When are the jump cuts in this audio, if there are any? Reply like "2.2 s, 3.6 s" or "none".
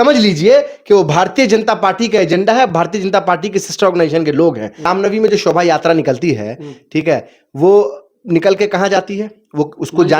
4.9 s